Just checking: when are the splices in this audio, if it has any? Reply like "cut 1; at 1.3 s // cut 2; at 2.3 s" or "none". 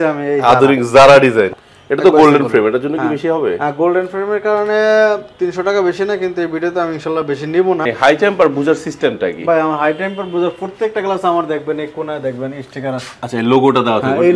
cut 1; at 1.6 s // cut 2; at 7.9 s